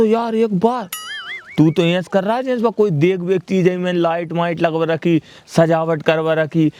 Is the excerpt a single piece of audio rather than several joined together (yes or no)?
yes